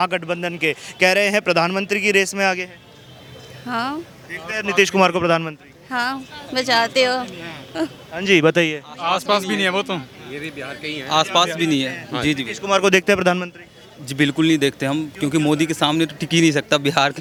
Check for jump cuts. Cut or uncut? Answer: uncut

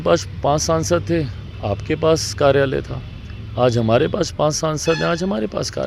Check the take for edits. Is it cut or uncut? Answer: uncut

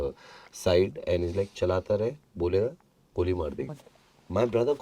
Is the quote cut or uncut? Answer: cut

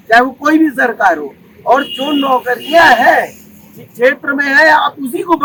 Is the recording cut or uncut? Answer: uncut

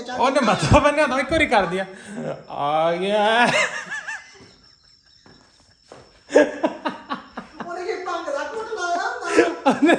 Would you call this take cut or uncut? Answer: uncut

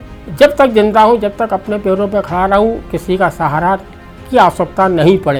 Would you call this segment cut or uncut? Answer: uncut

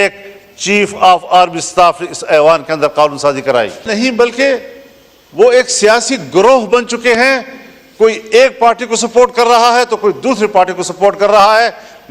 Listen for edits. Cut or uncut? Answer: cut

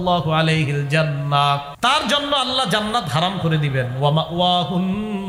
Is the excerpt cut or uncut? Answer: cut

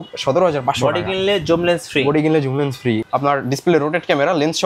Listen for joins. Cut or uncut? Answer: cut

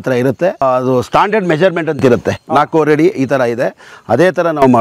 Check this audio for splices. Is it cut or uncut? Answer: uncut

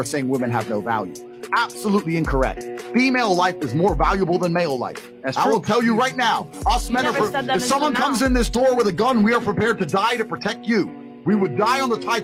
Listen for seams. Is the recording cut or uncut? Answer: uncut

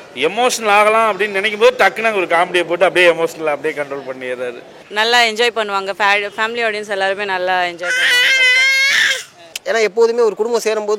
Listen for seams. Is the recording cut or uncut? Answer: cut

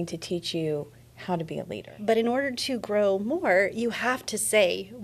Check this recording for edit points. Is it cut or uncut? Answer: cut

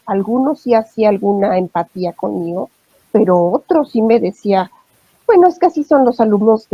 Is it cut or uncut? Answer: uncut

